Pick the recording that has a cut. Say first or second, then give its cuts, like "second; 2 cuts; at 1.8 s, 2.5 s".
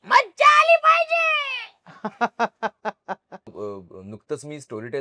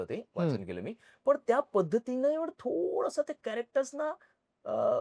first; 1 cut; at 3.5 s